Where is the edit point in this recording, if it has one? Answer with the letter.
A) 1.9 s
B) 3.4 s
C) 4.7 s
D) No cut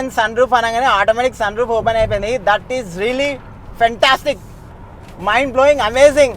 B